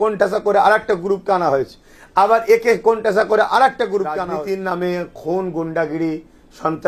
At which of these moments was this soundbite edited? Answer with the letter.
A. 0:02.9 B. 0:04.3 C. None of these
B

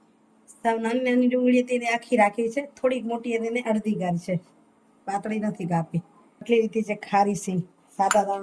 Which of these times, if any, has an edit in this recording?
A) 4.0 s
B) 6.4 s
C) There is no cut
B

